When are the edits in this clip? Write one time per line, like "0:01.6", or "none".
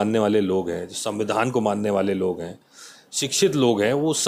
none